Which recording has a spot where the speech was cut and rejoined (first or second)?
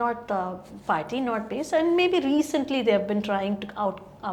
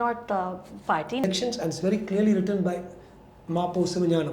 second